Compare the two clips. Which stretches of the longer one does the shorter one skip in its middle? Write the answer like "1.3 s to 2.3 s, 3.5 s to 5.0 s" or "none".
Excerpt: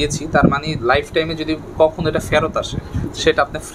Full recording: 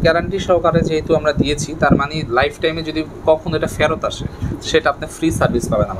none